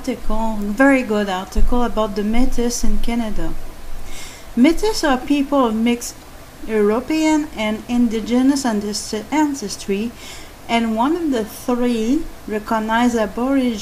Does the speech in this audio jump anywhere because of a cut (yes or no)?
no